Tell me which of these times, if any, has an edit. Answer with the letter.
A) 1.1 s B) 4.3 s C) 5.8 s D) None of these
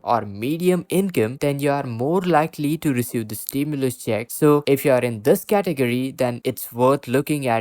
B